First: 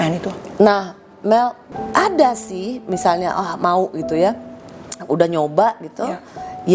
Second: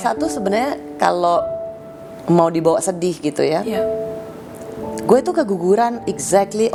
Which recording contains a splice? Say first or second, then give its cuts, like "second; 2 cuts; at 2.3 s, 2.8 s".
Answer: first; 1 cut; at 1.7 s